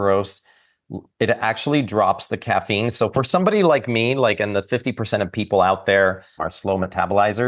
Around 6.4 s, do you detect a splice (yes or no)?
yes